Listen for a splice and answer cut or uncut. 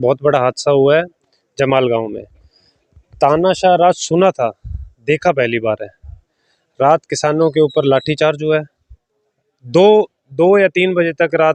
uncut